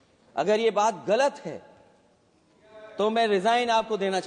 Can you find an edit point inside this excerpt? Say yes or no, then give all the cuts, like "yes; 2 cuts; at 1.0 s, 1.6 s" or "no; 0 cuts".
no; 0 cuts